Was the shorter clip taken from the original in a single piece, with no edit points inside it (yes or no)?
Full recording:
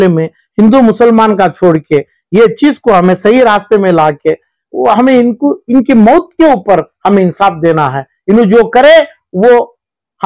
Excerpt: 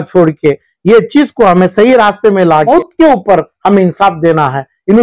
no